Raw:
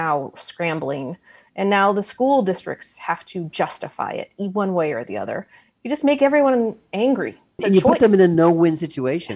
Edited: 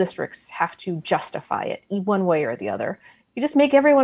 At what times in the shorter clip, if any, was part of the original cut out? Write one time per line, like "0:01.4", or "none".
none